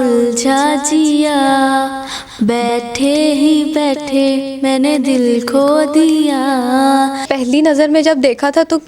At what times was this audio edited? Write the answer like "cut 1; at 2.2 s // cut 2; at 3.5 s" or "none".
cut 1; at 7.3 s